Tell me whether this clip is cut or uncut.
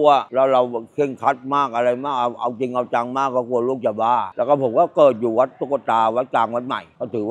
uncut